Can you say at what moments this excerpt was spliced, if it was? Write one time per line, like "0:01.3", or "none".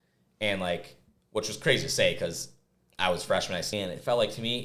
0:03.7